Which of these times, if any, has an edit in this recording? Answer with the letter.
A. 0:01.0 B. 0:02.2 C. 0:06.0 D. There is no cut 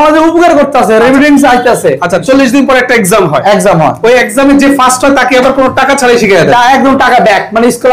B